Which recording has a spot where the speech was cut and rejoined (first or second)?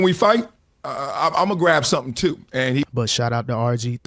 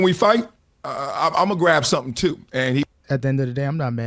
first